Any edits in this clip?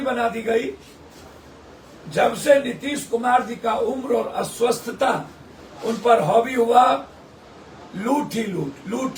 no; 0 cuts

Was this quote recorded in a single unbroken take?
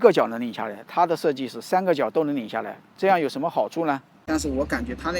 no; 1 cut; at 4.2 s

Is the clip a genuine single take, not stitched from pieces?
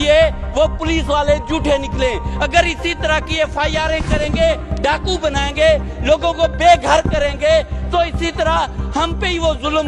yes; 0 cuts

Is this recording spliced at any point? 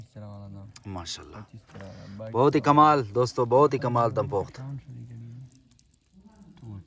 no; 0 cuts

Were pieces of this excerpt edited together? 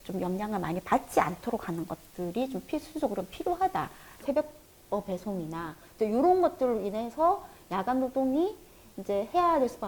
yes; 2 cuts; at 4.2 s, 5.9 s

